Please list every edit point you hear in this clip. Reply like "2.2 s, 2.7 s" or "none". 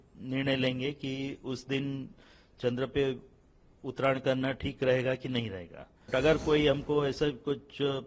6.1 s